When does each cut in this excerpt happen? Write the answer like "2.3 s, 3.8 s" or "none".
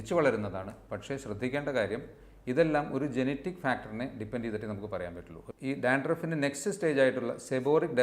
5.4 s